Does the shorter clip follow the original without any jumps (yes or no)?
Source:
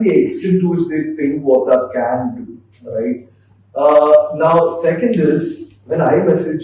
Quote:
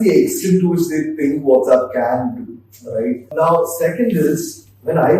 no